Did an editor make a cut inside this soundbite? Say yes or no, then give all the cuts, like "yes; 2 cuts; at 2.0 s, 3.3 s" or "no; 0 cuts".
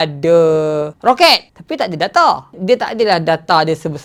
no; 0 cuts